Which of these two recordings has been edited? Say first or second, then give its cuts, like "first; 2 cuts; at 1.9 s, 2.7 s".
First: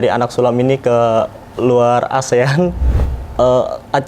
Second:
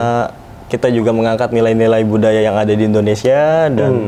first; 1 cut; at 2.9 s